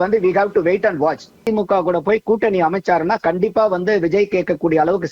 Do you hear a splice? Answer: yes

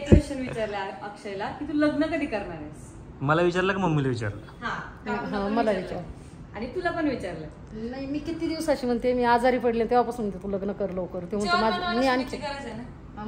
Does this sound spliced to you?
no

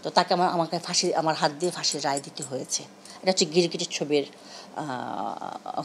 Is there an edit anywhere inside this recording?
no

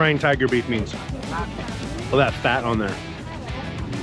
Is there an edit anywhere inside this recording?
no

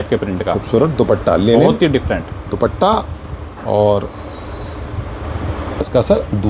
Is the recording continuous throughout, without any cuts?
yes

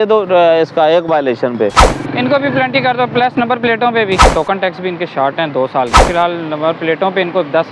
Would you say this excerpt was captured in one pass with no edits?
no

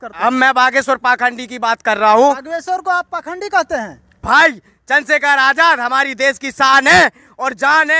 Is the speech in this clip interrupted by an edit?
yes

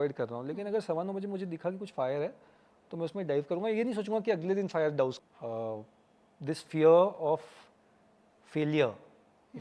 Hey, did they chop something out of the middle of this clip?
yes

